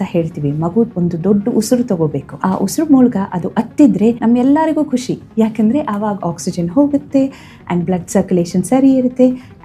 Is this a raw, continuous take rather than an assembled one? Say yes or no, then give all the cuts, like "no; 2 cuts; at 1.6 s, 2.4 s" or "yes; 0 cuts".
no; 3 cuts; at 0.9 s, 2.3 s, 4.2 s